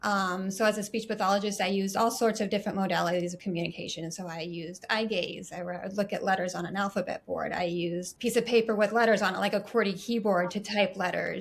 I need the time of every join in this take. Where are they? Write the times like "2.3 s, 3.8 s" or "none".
8.1 s